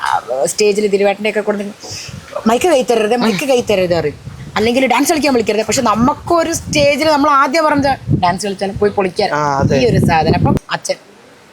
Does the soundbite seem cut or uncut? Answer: cut